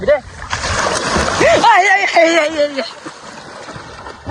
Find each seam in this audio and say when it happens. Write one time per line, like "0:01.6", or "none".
none